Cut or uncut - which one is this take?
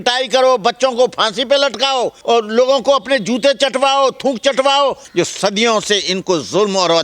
cut